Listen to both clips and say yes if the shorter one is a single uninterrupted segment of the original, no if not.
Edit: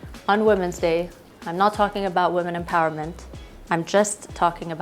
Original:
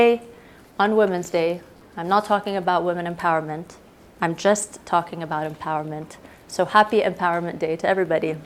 yes